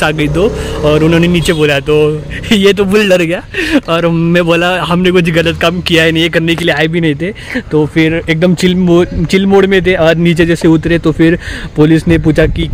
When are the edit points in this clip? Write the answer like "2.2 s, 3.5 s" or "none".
none